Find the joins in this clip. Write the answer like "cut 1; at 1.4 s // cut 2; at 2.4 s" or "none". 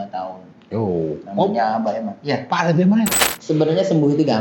cut 1; at 3.2 s

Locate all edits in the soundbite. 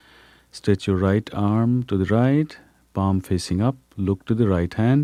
none

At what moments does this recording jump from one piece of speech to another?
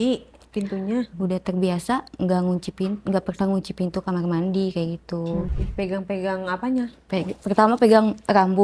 cut 1; at 1.1 s // cut 2; at 5.6 s

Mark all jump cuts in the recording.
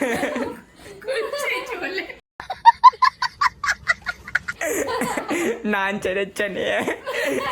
cut 1; at 2.2 s // cut 2; at 4.5 s

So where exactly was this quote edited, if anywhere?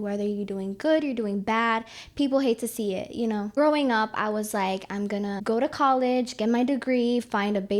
cut 1; at 3.5 s // cut 2; at 5.4 s

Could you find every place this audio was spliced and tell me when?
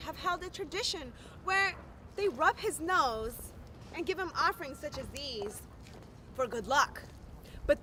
none

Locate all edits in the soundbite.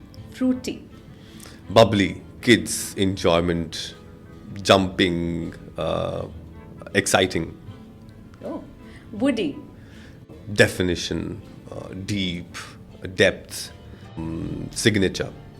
cut 1; at 10.3 s // cut 2; at 14.1 s

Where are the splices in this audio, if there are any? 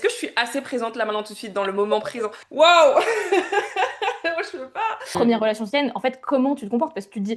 cut 1; at 5.0 s

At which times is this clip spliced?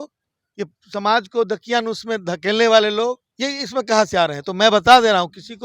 cut 1; at 3.3 s

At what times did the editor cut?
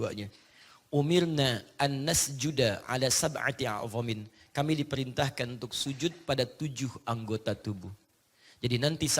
none

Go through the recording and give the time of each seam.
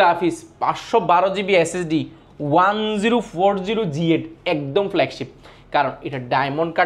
none

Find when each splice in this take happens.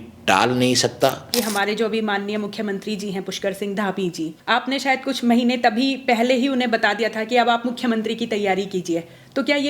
cut 1; at 1.3 s // cut 2; at 4.3 s

